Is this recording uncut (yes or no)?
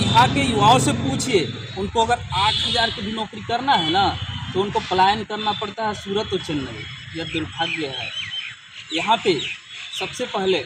yes